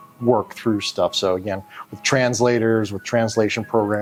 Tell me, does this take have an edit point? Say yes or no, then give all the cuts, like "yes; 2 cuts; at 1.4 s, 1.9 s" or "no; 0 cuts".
no; 0 cuts